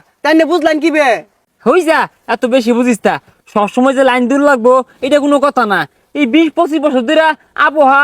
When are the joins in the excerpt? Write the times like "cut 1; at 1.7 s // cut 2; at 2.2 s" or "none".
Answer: none